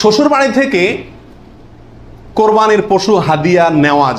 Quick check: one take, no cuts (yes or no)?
yes